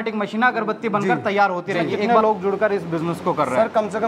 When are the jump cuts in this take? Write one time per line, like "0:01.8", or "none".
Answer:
0:02.1